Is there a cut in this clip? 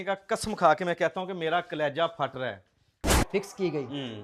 yes; 1 cut; at 3.2 s

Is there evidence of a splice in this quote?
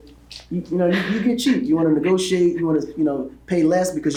no; 0 cuts

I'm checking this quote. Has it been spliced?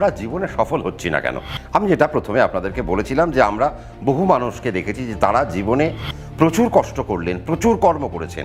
no; 0 cuts

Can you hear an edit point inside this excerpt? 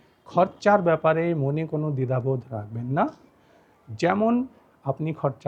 no; 0 cuts

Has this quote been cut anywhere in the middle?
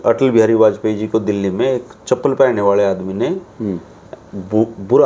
no; 0 cuts

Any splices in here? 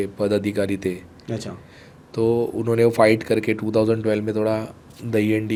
no; 0 cuts

